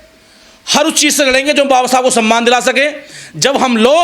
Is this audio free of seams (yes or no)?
yes